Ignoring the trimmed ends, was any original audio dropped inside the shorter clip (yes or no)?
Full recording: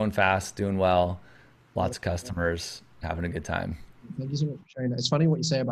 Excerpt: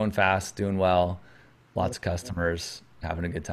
no